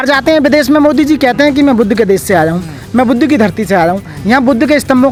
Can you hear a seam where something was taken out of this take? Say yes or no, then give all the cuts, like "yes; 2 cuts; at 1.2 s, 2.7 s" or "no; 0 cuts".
no; 0 cuts